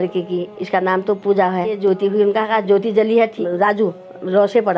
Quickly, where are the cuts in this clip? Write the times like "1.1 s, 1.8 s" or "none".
1.8 s, 3.4 s